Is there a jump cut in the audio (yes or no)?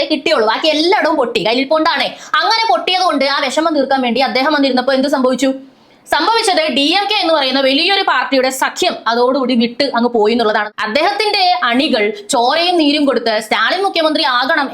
yes